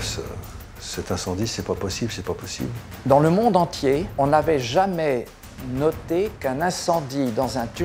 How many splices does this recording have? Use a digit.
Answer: 2